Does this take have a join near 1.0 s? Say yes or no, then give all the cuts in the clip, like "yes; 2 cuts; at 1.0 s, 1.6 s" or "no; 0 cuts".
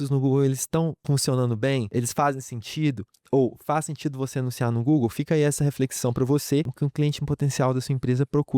yes; 3 cuts; at 1.0 s, 1.9 s, 6.7 s